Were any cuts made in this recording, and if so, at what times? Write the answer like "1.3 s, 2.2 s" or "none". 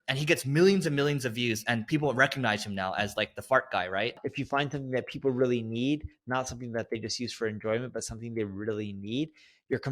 3.9 s